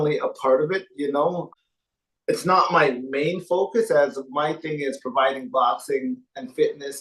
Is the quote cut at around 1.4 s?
yes; 1 cut; at 1.4 s

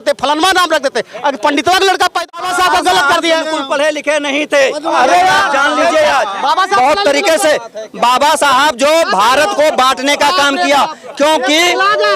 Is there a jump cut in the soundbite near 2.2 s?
yes; 1 cut; at 2.2 s

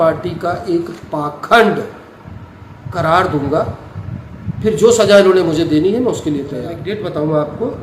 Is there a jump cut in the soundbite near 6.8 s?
yes; 1 cut; at 6.8 s

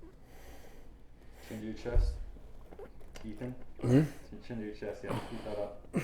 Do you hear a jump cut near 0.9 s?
yes; 1 cut; at 0.9 s

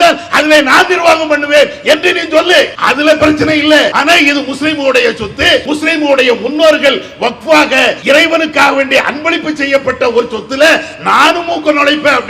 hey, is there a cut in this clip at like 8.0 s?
yes; 4 cuts; at 2.8 s, 4.0 s, 5.6 s, 8.0 s

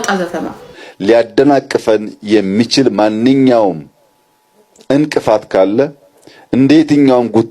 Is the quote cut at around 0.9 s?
yes; 1 cut; at 0.9 s

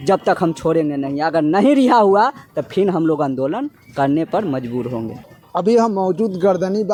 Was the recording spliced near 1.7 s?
no; 0 cuts

